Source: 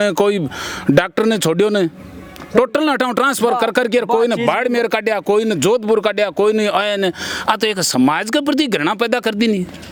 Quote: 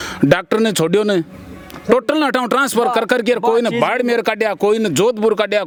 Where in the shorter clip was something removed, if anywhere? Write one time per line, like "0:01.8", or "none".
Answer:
none